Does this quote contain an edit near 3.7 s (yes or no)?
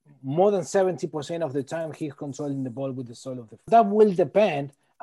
yes